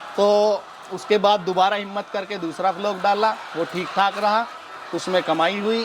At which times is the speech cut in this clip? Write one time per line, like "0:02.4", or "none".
none